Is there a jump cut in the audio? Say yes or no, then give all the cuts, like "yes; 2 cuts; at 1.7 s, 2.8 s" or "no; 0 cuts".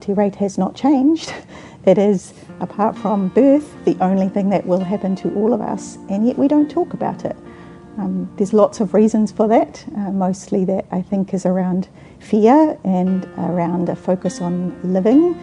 no; 0 cuts